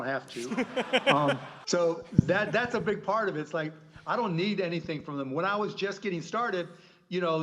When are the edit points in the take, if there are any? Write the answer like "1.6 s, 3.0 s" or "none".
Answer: 1.5 s